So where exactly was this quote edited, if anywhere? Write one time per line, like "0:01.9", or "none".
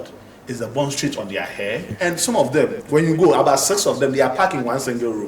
0:01.9